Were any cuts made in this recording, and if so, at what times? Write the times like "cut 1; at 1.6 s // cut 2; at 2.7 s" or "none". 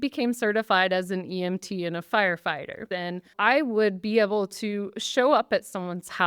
cut 1; at 3.2 s